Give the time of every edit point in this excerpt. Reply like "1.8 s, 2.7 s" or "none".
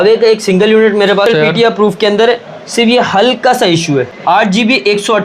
1.3 s, 4.1 s